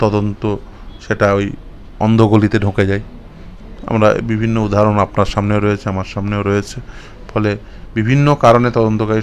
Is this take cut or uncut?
uncut